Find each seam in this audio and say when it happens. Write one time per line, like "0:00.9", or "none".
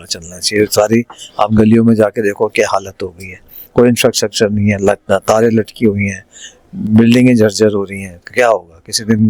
none